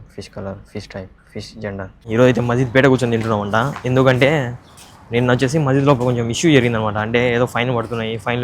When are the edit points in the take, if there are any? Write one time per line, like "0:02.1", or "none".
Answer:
0:02.0

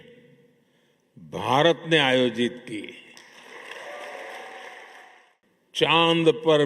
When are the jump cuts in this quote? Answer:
0:05.0

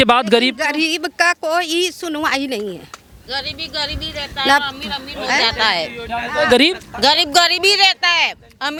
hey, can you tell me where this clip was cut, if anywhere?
none

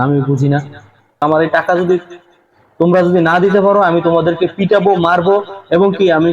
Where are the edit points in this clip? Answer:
0:01.2

